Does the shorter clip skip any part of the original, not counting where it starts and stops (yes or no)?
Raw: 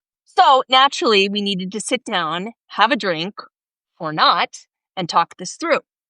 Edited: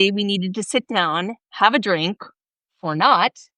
no